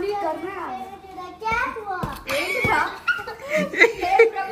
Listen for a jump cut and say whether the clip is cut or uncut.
uncut